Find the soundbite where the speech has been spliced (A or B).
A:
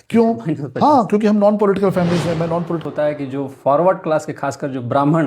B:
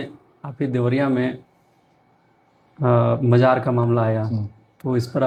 A